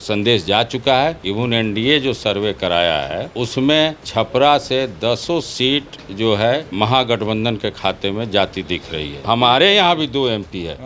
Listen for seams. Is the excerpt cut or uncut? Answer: cut